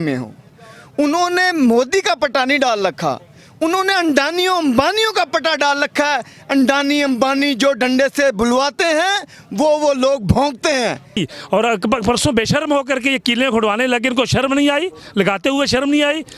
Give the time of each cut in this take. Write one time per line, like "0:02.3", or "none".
0:11.3